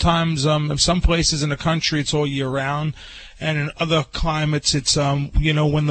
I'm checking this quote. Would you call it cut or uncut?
uncut